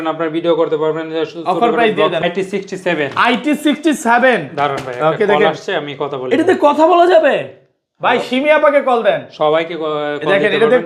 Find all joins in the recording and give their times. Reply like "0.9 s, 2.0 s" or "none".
2.2 s